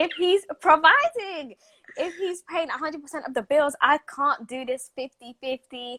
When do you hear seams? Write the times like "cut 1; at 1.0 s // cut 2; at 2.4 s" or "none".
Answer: none